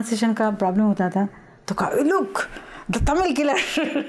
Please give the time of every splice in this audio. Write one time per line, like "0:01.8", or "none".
none